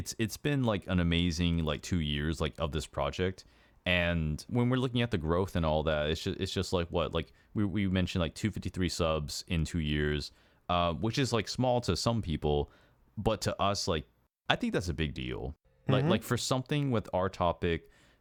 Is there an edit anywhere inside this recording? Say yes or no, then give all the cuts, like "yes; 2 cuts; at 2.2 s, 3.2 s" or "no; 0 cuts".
no; 0 cuts